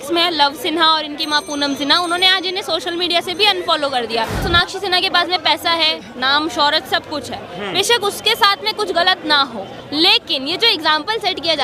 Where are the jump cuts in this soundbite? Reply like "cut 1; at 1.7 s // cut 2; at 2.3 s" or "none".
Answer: cut 1; at 4.4 s // cut 2; at 9.8 s